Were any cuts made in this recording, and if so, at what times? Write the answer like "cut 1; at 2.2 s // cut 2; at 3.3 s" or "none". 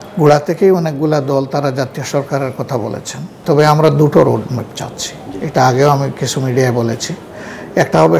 cut 1; at 3.4 s